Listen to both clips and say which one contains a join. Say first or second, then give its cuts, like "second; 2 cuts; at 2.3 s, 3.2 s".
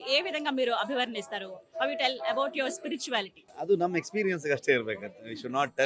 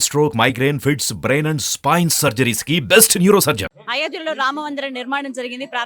second; 1 cut; at 3.7 s